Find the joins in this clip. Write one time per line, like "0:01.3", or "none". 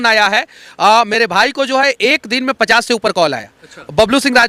none